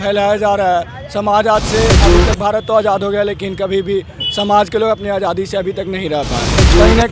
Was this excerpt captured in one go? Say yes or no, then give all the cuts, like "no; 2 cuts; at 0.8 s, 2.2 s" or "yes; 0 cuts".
yes; 0 cuts